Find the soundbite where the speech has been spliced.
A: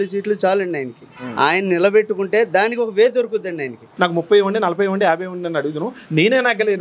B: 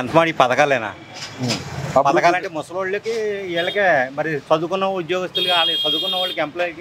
A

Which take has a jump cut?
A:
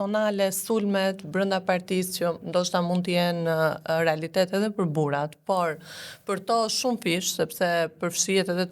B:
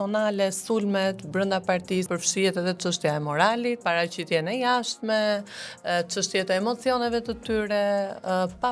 B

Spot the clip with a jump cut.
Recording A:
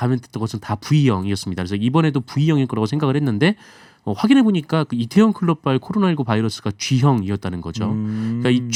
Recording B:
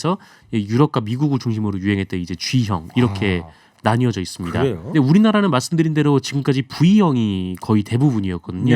B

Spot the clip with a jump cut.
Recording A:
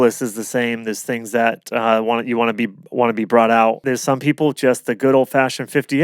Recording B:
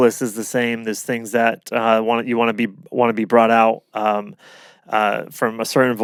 A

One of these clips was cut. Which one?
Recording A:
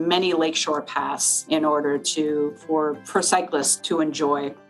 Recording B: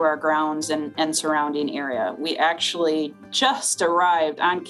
A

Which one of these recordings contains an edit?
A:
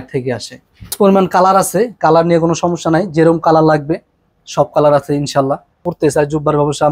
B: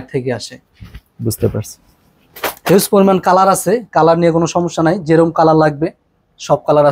A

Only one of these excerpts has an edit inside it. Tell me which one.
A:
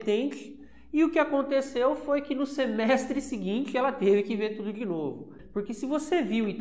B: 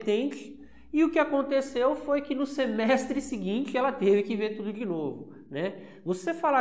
A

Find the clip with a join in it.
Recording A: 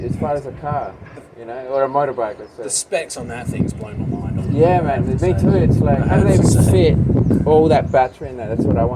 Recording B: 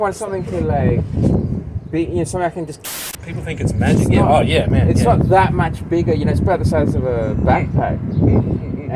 B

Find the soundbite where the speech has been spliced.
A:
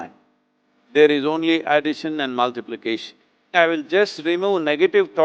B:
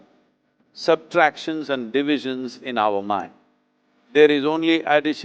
A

